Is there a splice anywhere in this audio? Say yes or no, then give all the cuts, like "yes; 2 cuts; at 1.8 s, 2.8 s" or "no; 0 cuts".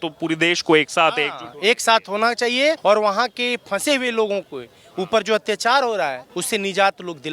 yes; 2 cuts; at 2.8 s, 6.3 s